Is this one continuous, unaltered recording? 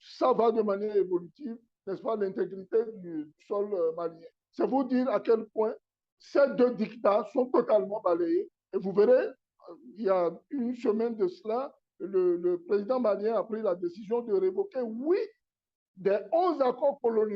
yes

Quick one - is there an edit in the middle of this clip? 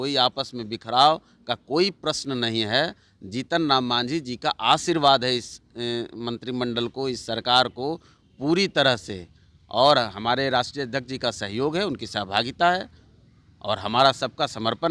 no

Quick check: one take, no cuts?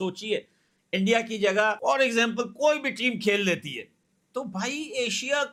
yes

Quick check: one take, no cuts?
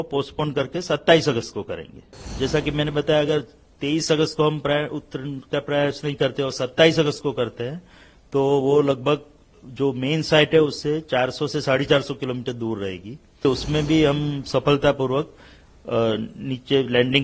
no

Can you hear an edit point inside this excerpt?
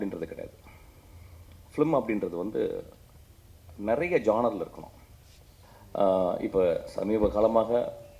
yes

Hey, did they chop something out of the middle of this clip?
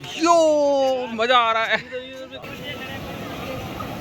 yes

